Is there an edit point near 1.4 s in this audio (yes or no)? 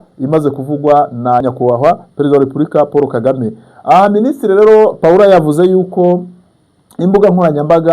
yes